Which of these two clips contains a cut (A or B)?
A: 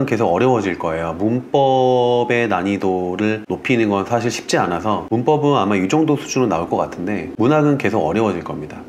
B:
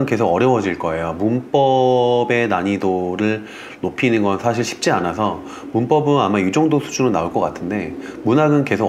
A